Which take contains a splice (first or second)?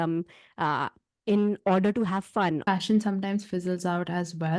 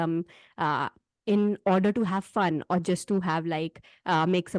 first